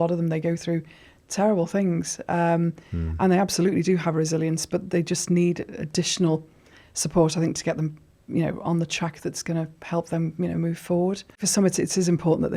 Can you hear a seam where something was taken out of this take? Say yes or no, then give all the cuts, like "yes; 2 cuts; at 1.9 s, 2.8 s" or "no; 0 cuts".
yes; 1 cut; at 11.5 s